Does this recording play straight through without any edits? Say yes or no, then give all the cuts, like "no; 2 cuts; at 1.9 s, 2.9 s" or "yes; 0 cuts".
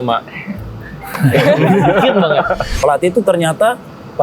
no; 1 cut; at 2.7 s